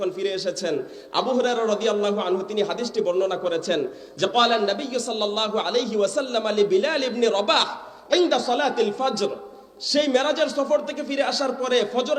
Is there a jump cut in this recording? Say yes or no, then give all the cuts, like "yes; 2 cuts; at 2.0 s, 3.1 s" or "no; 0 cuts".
no; 0 cuts